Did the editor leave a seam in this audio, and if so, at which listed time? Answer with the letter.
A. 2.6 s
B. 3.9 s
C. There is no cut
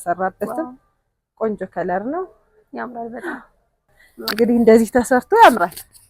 B